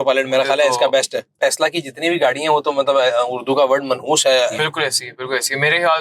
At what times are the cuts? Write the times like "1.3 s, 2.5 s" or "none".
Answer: 1.4 s, 4.5 s